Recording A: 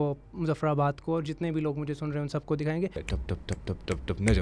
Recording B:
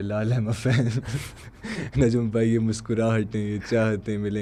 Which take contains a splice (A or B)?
A